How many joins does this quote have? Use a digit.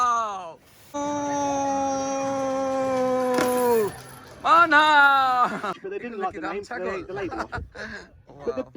2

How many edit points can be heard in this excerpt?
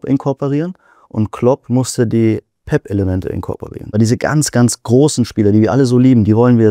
1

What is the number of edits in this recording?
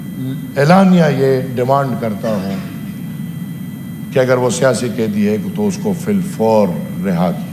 0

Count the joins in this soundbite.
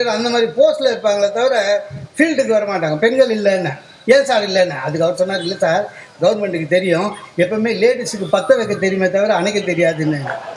0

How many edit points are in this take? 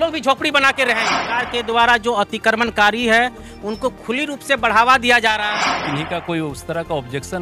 2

